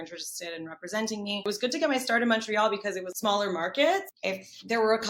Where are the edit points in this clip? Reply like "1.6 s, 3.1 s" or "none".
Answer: 1.4 s, 3.1 s, 4.1 s